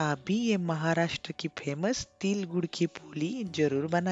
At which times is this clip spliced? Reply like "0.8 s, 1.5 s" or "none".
none